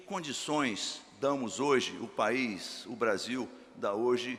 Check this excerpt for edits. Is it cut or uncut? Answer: uncut